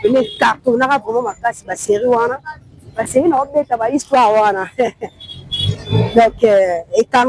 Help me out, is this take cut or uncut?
uncut